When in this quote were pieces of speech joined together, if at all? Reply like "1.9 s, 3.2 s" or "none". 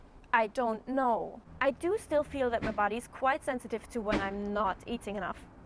1.0 s